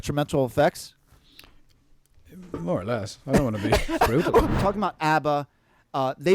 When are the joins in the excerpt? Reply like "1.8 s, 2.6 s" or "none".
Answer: 4.5 s